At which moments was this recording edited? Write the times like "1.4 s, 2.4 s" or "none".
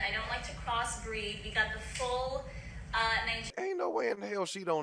3.5 s